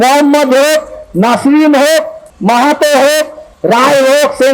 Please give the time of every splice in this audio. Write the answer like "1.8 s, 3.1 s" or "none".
none